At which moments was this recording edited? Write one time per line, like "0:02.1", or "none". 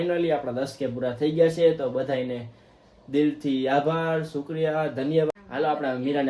0:05.3